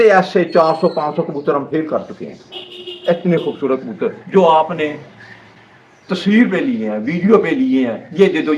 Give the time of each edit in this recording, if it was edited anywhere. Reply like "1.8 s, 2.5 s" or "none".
none